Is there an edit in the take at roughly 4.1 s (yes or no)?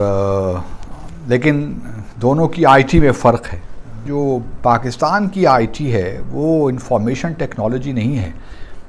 yes